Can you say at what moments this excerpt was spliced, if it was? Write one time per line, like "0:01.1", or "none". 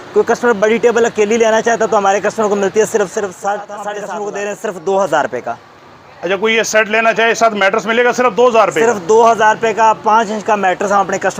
0:03.9